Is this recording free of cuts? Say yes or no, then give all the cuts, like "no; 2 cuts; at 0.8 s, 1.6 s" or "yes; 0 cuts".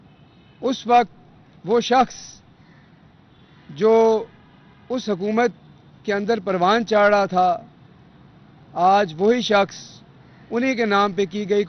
yes; 0 cuts